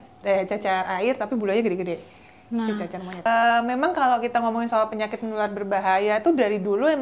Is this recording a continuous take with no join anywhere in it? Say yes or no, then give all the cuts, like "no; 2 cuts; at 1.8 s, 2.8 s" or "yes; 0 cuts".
no; 1 cut; at 3.2 s